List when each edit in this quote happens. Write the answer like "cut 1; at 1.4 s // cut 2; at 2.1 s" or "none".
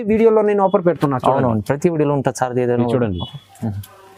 none